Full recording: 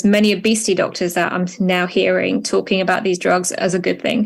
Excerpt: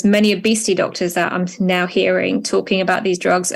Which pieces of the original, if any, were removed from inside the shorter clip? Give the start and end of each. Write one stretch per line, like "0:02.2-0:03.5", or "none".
none

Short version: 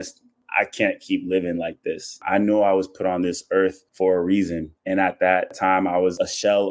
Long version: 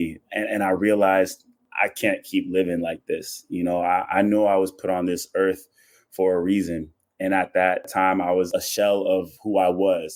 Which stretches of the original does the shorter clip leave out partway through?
0:03.5-0:04.1
0:05.7-0:06.0
0:06.9-0:07.0

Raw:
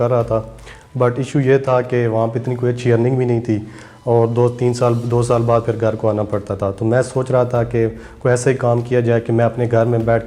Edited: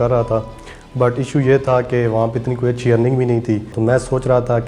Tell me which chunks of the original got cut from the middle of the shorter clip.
0:03.7-0:06.8

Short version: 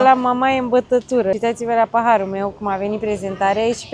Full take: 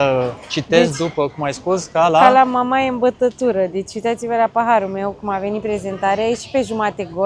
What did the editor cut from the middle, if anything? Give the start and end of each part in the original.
0:03.7-0:04.0

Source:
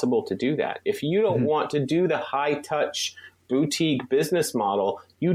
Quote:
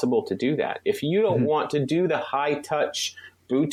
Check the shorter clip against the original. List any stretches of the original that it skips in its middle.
none

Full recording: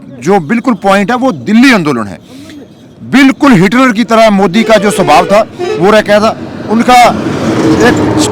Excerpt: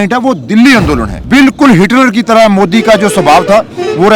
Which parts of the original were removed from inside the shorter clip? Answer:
0:02.1-0:03.0

